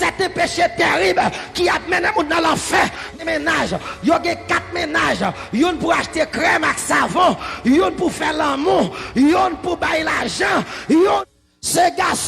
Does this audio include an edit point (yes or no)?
yes